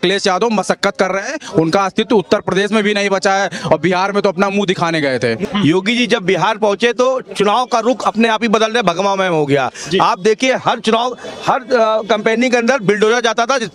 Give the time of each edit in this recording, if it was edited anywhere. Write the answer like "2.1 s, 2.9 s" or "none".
5.4 s